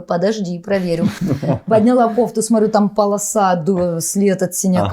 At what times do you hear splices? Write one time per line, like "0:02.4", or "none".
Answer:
none